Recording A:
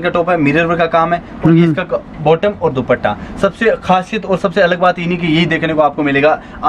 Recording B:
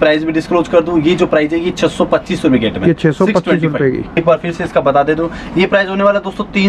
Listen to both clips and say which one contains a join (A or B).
B